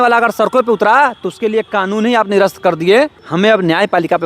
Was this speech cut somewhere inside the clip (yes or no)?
yes